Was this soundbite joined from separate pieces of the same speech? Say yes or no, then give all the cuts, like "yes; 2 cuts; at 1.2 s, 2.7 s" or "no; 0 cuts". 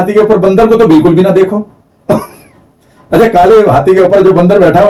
no; 0 cuts